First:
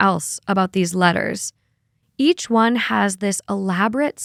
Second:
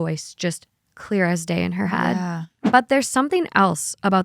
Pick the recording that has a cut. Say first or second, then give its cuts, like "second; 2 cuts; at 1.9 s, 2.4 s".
second; 1 cut; at 2.6 s